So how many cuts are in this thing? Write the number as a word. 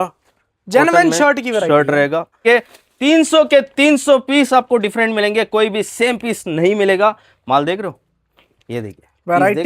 one